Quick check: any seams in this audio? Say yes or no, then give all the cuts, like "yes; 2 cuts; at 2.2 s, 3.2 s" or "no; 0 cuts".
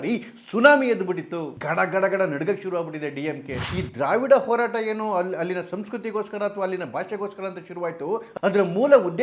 yes; 1 cut; at 3.7 s